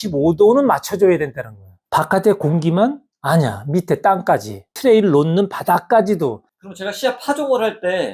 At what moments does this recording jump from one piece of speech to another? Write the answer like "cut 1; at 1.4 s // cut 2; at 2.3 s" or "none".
cut 1; at 4.7 s // cut 2; at 6.5 s